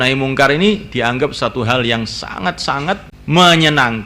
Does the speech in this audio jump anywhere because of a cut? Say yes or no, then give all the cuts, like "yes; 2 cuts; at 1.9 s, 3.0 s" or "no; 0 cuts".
yes; 1 cut; at 3.1 s